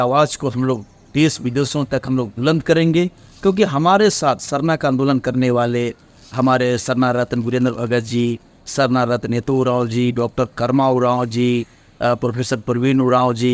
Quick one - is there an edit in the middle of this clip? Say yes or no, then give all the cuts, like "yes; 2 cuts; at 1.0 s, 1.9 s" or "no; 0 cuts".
no; 0 cuts